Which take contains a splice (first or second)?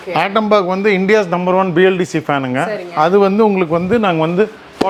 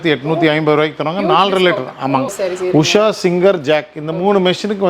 second